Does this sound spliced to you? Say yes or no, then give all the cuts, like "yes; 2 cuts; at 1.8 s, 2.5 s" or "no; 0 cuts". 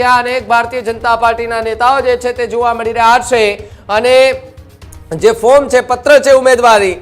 no; 0 cuts